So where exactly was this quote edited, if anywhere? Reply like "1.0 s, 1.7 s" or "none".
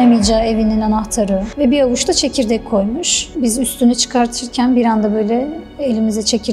3.3 s